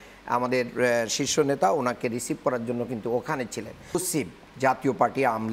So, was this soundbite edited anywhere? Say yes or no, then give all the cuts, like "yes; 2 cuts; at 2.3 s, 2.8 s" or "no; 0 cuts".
yes; 1 cut; at 3.9 s